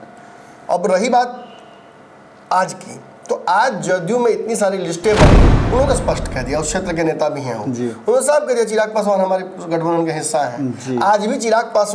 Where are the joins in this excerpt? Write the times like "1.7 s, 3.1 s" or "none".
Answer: 5.5 s